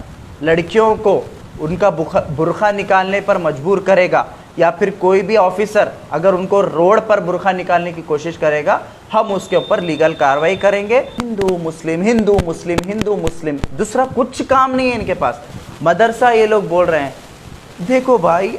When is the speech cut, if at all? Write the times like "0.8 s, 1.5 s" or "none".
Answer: 11.2 s